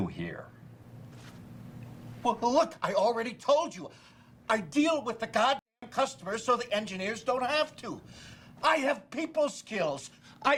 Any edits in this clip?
no; 0 cuts

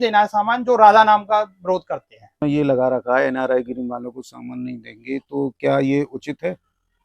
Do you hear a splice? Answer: yes; 1 cut; at 2.4 s

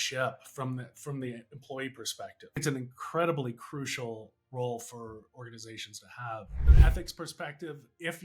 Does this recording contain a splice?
yes; 2 cuts; at 2.6 s, 6.7 s

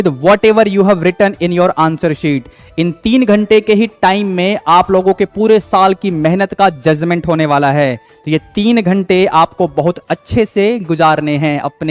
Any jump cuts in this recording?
no; 0 cuts

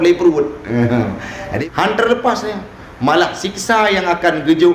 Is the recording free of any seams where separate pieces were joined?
no; 1 cut; at 1.4 s

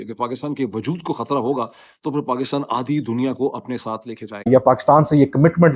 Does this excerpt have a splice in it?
yes; 1 cut; at 4.5 s

